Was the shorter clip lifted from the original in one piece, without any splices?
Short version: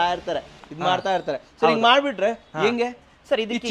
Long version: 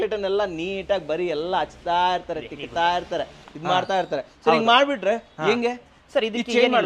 yes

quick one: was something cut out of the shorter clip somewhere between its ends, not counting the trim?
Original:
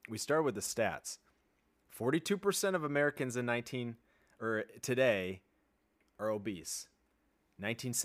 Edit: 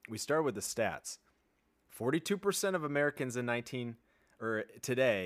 no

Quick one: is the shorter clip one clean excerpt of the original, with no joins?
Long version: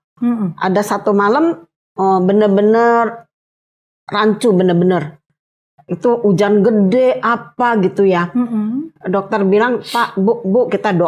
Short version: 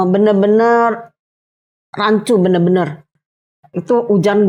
yes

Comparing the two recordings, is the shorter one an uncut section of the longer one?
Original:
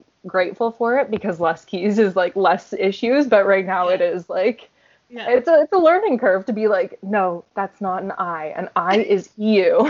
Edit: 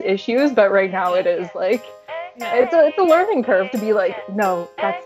yes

